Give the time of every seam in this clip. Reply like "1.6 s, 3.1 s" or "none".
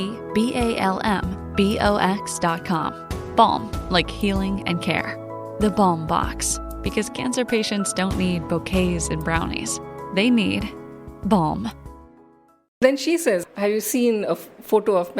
12.6 s